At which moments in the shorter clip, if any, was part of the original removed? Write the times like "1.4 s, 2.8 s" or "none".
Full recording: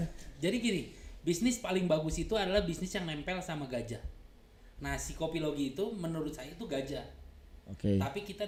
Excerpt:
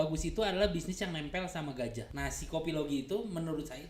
2.1 s